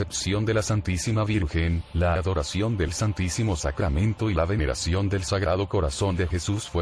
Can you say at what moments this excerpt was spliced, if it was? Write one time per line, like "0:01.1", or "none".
none